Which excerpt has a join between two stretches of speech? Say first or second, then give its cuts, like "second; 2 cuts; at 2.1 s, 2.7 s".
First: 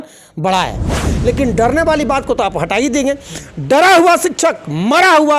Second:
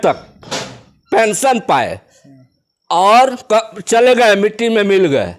first; 1 cut; at 1.1 s